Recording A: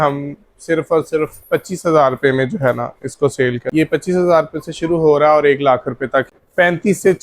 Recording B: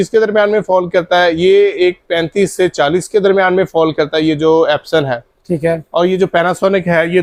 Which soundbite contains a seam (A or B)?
A